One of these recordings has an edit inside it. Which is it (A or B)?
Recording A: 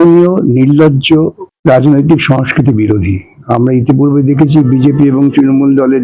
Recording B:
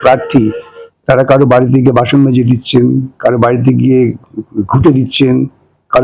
A